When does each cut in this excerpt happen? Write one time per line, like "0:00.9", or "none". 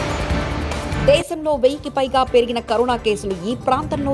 0:00.9